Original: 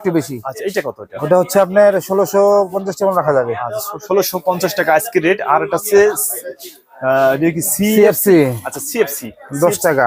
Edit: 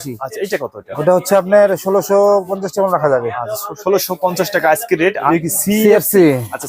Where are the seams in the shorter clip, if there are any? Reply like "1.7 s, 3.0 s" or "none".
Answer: 5.3 s